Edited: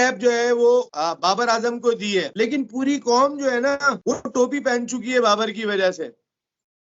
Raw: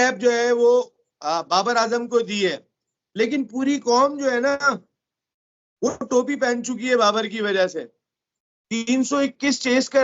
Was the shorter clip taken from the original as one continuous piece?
no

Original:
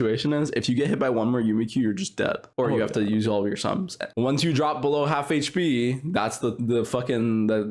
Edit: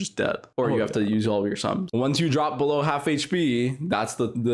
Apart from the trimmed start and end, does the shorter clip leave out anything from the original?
yes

